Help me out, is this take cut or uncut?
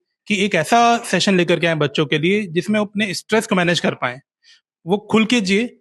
uncut